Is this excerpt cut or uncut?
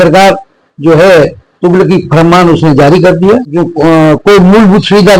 cut